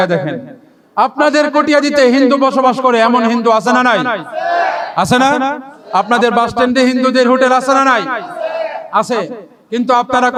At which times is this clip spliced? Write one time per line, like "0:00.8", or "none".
none